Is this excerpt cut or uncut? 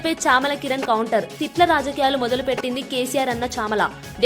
uncut